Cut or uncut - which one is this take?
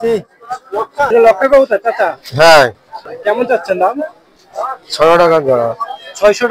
cut